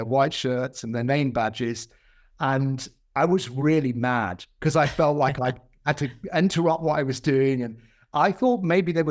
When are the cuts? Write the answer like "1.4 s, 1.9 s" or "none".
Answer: none